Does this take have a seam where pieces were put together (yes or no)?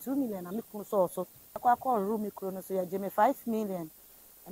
yes